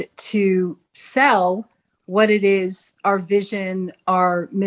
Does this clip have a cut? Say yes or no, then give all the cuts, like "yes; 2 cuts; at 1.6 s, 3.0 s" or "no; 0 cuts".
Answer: no; 0 cuts